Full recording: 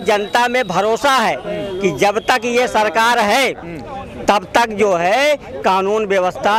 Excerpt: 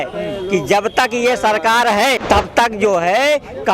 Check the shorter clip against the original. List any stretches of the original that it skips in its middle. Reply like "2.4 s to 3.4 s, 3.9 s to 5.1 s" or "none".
3.5 s to 4.2 s